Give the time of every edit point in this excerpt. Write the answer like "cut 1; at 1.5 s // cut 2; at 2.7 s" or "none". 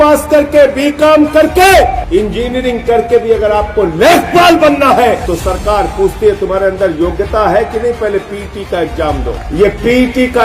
cut 1; at 2.0 s // cut 2; at 5.2 s // cut 3; at 9.4 s